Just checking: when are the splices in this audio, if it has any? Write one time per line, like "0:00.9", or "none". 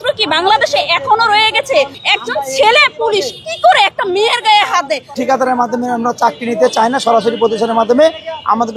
0:02.0
0:05.1